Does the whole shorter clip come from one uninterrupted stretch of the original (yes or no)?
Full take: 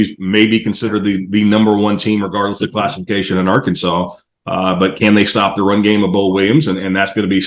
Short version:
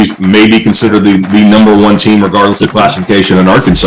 yes